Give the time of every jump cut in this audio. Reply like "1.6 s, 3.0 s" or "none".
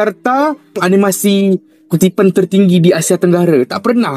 none